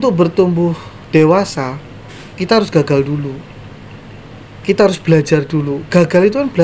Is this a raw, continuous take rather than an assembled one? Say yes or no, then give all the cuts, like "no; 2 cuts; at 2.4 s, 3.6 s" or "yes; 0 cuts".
yes; 0 cuts